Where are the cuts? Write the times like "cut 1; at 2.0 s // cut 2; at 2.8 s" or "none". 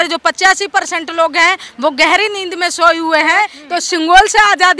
cut 1; at 3.6 s